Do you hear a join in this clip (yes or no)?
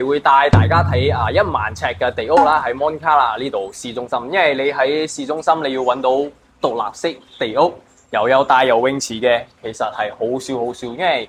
no